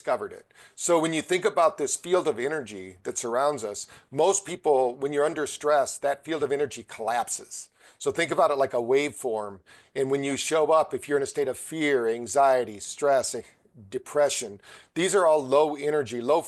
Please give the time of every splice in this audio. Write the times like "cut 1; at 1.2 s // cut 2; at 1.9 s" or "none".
none

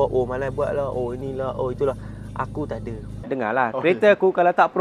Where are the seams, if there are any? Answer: cut 1; at 3.2 s

